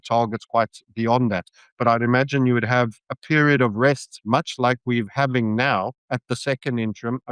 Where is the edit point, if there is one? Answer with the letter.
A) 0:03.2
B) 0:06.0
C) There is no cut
B